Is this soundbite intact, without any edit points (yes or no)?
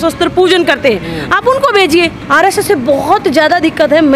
no